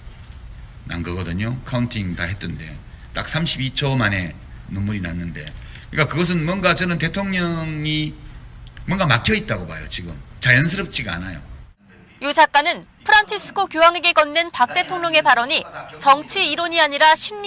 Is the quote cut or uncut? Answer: uncut